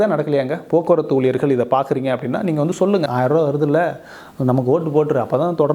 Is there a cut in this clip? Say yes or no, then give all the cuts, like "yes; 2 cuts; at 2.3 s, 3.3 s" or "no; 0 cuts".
yes; 1 cut; at 3.0 s